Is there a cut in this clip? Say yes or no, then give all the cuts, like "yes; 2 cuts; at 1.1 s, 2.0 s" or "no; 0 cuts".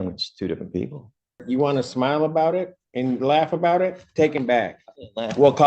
yes; 1 cut; at 1.4 s